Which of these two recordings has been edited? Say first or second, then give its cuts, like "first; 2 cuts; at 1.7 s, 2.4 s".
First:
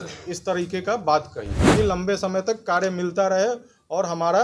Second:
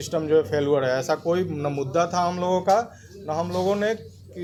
first; 1 cut; at 1.6 s